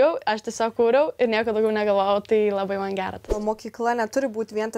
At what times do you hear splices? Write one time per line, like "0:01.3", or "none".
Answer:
0:03.4